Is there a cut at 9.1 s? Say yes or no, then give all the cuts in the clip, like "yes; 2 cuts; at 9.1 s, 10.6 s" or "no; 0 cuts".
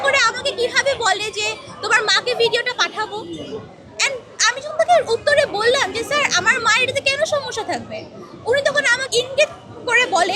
yes; 1 cut; at 9.1 s